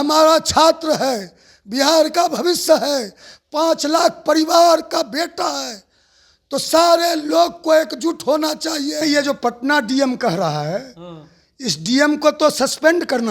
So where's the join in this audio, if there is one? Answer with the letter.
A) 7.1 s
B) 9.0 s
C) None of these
B